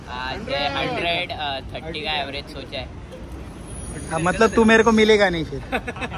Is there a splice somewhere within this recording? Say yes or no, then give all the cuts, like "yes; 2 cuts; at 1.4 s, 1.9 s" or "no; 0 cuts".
no; 0 cuts